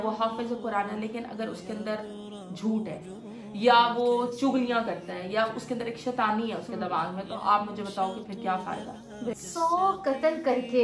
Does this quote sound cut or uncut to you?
cut